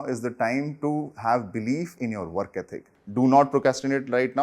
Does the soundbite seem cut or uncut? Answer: cut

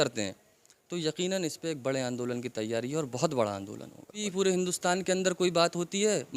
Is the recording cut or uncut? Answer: cut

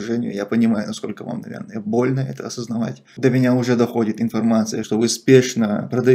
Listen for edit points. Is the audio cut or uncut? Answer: cut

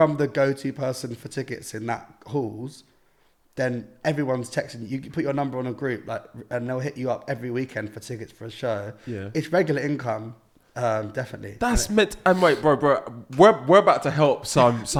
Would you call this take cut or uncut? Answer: uncut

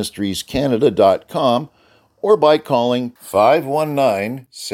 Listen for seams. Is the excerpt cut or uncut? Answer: uncut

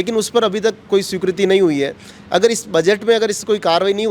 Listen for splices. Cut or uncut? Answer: uncut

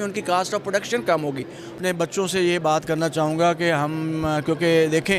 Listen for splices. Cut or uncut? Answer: cut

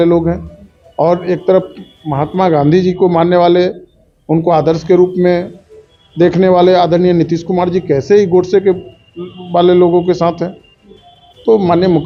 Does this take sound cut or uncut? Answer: uncut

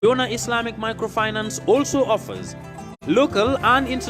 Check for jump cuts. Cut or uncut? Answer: uncut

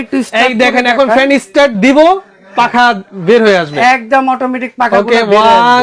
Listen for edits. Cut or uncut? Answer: uncut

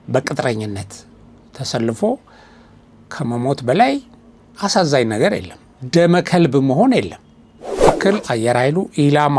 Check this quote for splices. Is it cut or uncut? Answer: cut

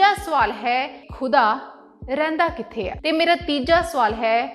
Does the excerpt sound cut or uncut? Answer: cut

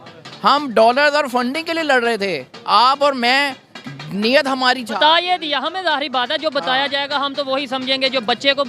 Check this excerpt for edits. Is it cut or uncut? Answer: uncut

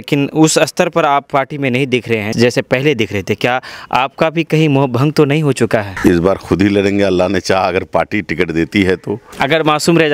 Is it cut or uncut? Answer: cut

